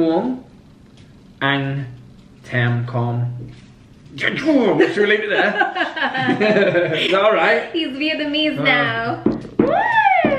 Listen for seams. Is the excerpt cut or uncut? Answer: uncut